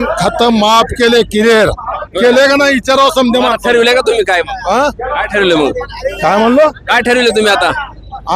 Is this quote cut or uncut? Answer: uncut